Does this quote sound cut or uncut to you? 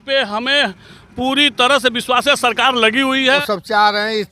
cut